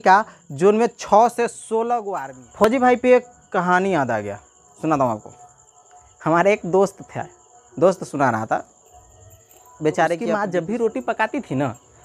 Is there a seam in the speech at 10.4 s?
yes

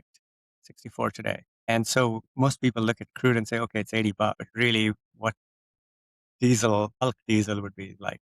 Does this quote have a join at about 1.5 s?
yes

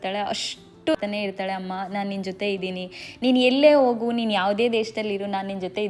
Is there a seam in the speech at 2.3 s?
no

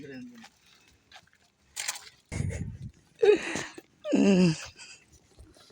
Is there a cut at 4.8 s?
no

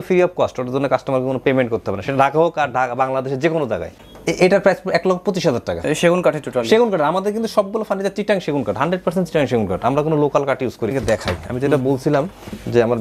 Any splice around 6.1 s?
no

